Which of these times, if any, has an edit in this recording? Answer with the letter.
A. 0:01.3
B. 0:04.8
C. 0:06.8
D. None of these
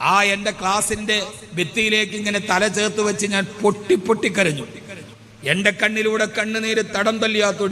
D